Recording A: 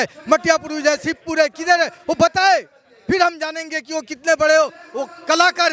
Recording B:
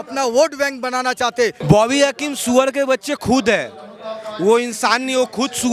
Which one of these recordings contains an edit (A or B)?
B